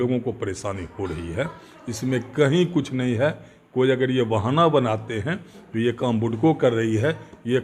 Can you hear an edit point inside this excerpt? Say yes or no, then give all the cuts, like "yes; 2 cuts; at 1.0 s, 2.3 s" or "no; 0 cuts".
no; 0 cuts